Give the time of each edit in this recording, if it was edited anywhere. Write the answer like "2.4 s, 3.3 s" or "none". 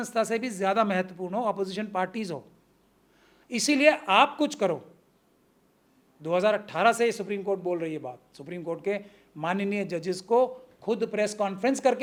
none